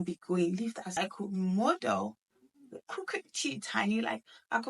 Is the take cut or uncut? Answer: cut